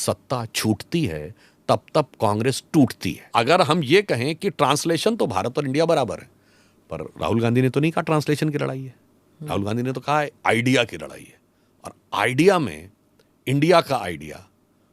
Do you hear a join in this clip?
yes; 1 cut; at 3.3 s

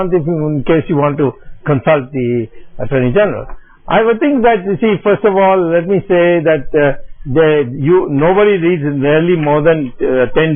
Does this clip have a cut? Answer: no; 0 cuts

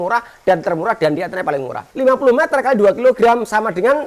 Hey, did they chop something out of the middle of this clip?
yes; 1 cut; at 1.8 s

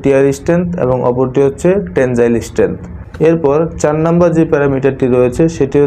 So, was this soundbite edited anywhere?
no; 0 cuts

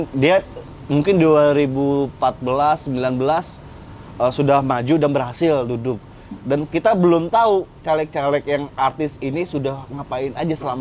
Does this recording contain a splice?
no; 0 cuts

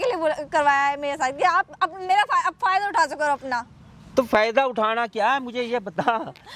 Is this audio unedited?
yes; 0 cuts

